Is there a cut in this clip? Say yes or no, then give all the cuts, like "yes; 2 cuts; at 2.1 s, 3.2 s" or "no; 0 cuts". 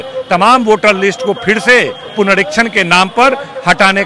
no; 0 cuts